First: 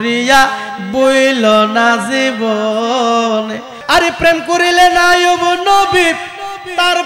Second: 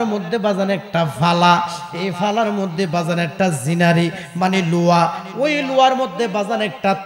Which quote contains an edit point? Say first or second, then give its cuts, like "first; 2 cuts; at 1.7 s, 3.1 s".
first; 1 cut; at 3.7 s